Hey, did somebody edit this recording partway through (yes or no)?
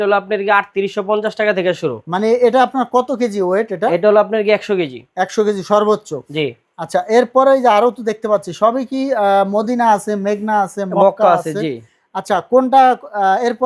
no